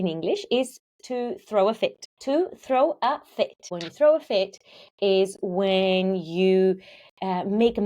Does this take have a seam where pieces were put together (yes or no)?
yes